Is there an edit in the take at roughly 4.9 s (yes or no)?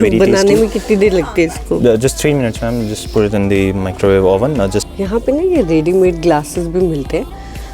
yes